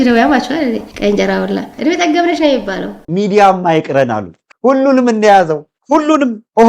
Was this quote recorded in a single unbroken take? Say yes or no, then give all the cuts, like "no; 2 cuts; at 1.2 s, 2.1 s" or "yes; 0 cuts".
no; 2 cuts; at 1.7 s, 3.0 s